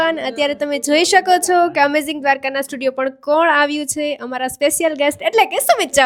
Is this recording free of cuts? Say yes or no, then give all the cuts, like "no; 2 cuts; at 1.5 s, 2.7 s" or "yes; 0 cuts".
yes; 0 cuts